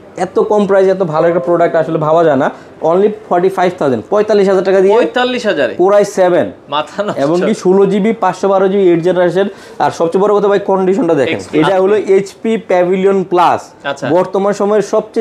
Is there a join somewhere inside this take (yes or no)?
yes